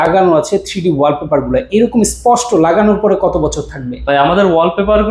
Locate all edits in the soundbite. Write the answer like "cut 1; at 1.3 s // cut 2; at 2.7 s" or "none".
none